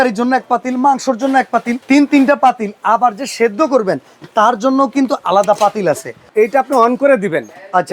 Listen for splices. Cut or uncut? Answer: cut